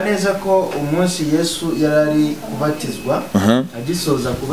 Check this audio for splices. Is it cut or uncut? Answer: uncut